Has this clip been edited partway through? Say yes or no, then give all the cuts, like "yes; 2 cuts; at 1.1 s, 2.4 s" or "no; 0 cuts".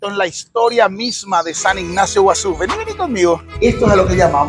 yes; 1 cut; at 3.5 s